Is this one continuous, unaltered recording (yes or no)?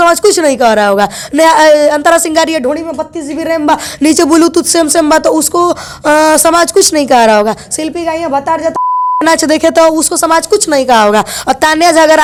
yes